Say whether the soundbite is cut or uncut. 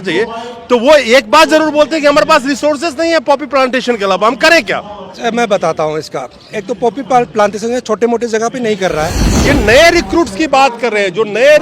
cut